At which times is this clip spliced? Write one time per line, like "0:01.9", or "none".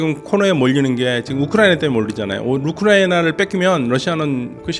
none

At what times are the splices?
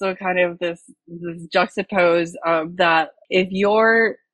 0:03.2

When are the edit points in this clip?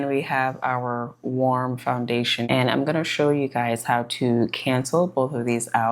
0:02.5

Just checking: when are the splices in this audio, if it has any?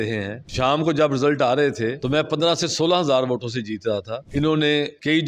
0:02.0
0:04.2

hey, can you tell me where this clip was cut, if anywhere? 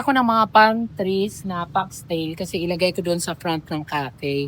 none

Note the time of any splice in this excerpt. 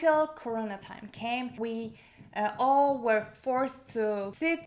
0:01.6

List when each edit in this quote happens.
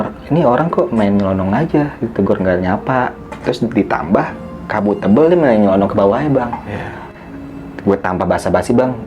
0:07.1

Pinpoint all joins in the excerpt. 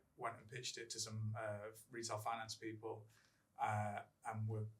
none

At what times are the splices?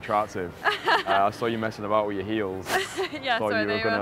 none

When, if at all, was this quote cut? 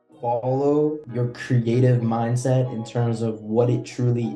0:01.0

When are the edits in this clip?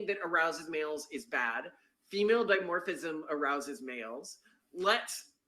none

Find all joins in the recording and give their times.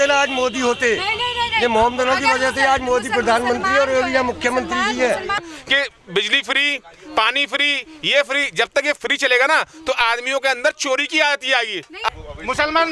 0:05.4
0:12.1

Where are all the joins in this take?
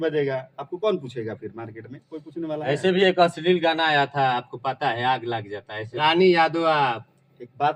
0:05.9

